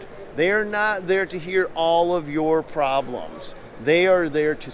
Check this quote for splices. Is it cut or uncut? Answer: uncut